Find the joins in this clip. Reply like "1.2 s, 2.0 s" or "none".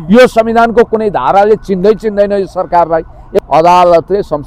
3.4 s